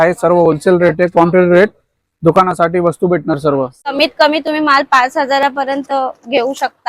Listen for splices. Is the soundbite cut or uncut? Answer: uncut